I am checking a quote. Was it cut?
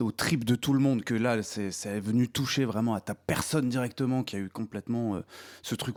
no; 0 cuts

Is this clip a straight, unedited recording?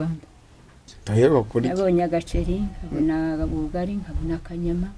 no; 1 cut; at 0.9 s

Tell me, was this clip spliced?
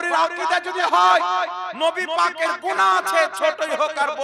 no; 0 cuts

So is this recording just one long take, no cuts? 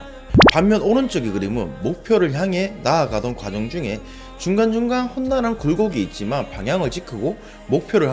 yes; 0 cuts

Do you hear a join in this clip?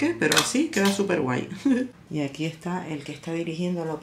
yes; 1 cut; at 1.9 s

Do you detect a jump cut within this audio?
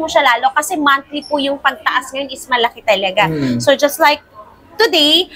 no; 0 cuts

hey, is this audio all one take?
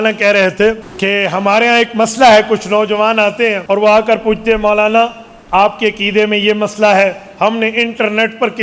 no; 2 cuts; at 0.9 s, 3.6 s

